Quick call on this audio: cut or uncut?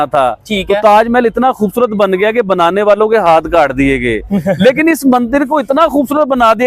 uncut